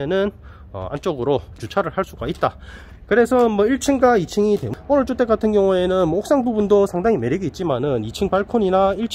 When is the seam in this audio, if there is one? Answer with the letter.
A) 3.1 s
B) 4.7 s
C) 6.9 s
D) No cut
B